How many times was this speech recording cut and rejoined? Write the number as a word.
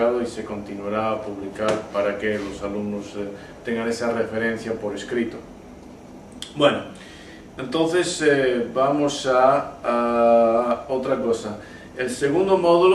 one